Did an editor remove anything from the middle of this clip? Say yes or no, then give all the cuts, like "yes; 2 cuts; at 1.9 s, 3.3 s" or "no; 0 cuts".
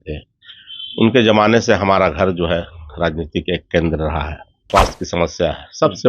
yes; 1 cut; at 4.7 s